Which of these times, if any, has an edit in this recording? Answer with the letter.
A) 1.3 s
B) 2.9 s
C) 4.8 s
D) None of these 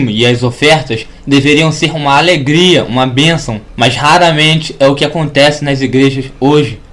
C